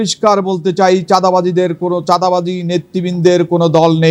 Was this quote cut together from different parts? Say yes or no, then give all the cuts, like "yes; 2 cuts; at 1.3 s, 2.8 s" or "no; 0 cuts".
no; 0 cuts